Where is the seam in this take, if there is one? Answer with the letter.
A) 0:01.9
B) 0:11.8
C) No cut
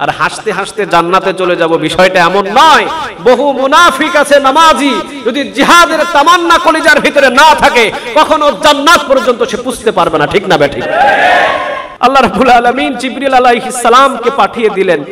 B